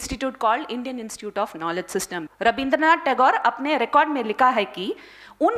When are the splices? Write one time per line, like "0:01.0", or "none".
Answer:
0:02.2